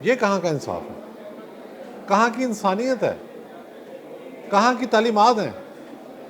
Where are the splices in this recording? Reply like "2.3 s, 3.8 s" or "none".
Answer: none